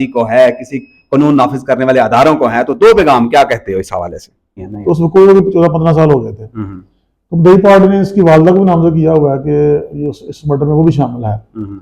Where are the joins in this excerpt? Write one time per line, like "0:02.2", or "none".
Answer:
0:04.7